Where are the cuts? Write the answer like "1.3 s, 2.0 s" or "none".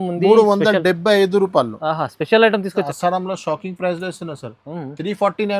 2.9 s